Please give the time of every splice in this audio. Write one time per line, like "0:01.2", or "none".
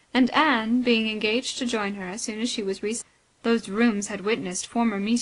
none